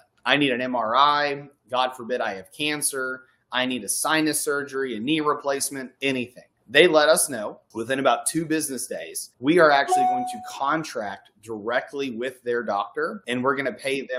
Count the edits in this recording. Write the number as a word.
zero